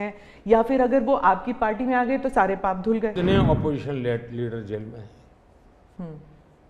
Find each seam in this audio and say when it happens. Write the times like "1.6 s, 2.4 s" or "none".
3.1 s